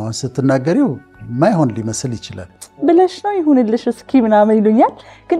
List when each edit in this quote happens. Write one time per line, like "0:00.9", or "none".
0:02.6

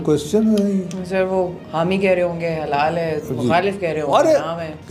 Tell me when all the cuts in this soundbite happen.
none

